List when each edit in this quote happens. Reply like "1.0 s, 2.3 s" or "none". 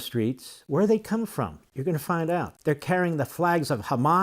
2.5 s